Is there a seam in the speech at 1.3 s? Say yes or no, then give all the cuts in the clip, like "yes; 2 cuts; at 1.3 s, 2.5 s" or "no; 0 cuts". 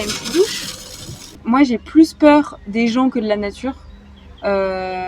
yes; 1 cut; at 1.3 s